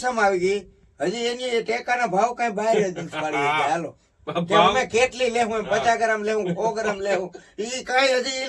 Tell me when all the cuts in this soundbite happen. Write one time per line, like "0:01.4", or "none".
none

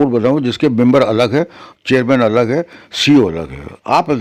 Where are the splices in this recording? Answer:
none

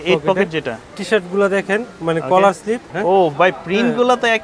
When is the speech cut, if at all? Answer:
0:01.0
0:02.9

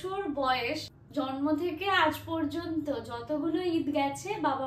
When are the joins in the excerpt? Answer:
0:01.0

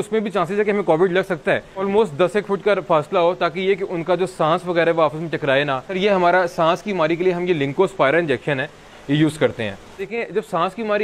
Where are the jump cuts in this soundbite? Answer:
0:01.8
0:06.0
0:10.1

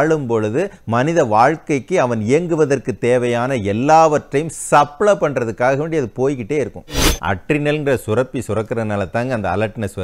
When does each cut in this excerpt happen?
0:07.1

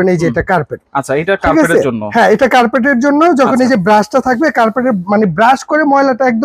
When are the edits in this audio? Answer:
none

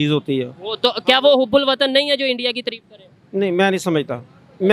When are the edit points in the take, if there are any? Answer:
none

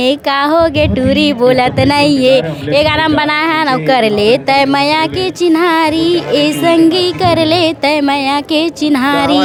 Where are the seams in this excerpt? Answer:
none

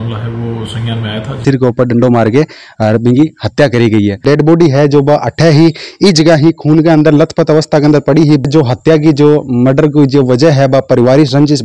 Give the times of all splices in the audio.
0:01.4
0:04.2
0:08.4

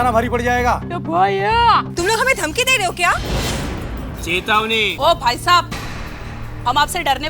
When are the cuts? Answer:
0:04.9

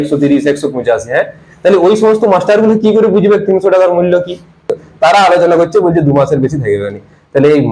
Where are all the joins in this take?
0:04.8

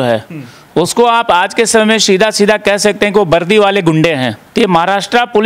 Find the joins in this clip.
0:04.4

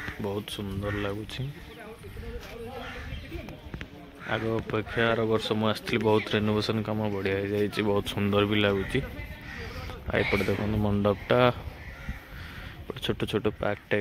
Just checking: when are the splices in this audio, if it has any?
none

